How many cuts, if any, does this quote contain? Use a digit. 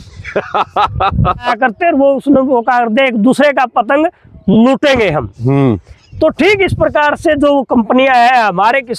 1